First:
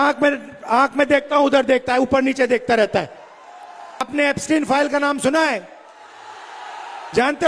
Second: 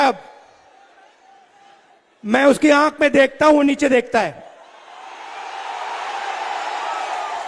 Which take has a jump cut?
first; 1 cut; at 4.1 s

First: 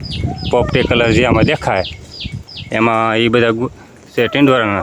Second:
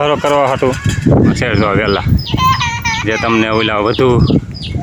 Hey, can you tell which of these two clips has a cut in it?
second; 1 cut; at 1.4 s

